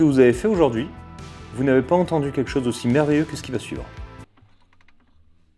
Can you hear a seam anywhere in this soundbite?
no; 0 cuts

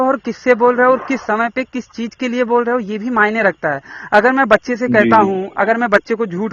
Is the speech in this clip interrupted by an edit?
no; 0 cuts

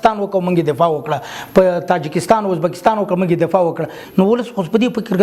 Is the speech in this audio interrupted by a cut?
yes; 1 cut; at 4.0 s

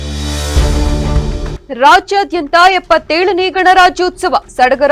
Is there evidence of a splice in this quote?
yes; 1 cut; at 1.5 s

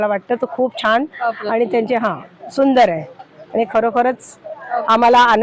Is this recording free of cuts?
yes; 0 cuts

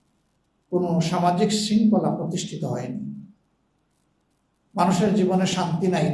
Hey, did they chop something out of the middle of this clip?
no; 0 cuts

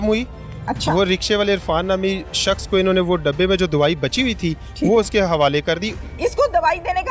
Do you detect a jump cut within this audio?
yes; 1 cut; at 6.0 s

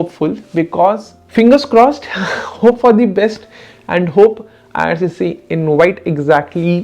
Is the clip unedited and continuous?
no; 1 cut; at 1.1 s

